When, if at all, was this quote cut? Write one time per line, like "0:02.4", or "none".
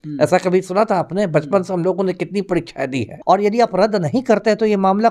0:03.1